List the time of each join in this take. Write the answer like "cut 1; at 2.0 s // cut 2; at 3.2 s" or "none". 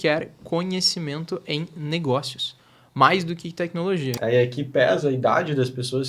cut 1; at 4.1 s